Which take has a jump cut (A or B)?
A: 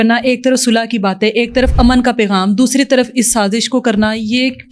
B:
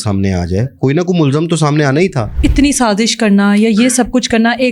B